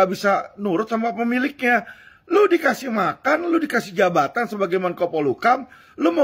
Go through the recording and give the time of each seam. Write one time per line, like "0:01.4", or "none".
none